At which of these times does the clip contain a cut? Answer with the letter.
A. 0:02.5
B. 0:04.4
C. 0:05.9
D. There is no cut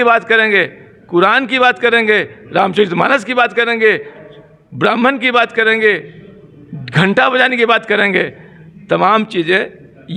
D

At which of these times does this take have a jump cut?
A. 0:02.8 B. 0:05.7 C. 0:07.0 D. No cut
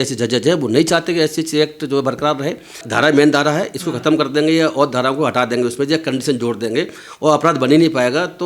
A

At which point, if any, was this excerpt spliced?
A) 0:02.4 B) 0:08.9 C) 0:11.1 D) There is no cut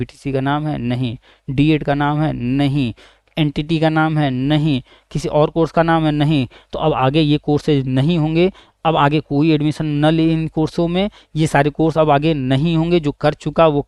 D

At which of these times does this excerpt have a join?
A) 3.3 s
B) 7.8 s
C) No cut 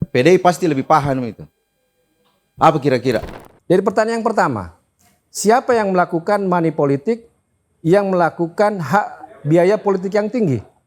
A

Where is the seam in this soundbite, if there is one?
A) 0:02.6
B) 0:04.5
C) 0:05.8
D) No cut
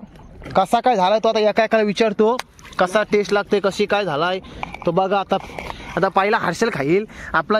D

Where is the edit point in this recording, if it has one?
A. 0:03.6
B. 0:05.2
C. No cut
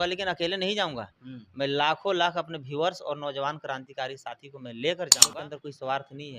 B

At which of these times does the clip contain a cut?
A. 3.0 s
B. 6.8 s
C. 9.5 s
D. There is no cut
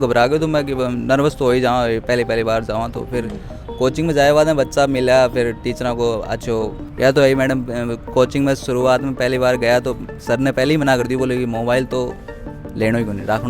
B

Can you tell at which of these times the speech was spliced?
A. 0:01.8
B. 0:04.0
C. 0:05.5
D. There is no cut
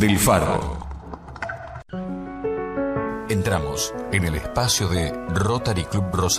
A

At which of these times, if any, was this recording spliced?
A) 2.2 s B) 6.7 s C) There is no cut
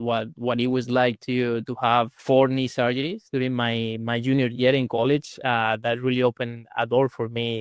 A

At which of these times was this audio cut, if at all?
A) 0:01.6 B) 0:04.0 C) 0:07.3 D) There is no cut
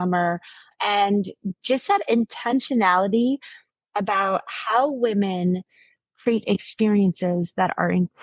D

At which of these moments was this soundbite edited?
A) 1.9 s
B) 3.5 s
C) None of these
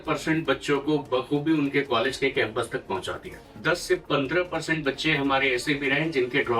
B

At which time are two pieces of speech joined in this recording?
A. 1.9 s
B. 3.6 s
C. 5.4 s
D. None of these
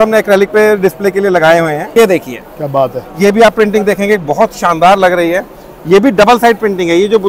A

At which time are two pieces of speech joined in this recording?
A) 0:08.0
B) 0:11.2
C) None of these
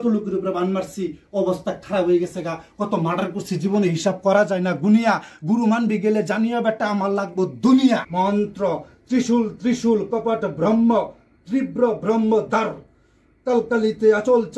A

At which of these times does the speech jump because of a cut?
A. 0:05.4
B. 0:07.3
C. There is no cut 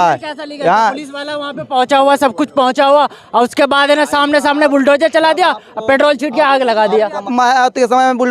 B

